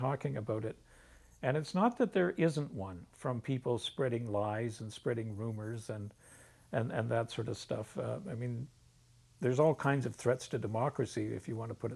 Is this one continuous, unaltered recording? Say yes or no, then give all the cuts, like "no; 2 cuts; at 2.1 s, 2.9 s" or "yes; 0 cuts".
yes; 0 cuts